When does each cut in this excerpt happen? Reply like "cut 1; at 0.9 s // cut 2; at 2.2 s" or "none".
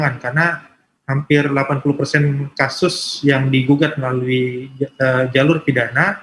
none